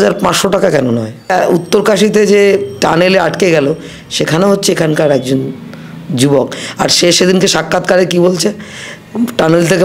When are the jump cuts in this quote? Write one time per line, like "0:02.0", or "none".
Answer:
0:01.3